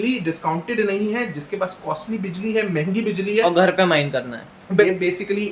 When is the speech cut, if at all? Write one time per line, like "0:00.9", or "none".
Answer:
0:04.5